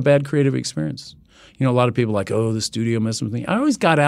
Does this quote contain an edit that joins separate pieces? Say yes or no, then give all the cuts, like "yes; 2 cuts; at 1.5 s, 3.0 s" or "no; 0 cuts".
no; 0 cuts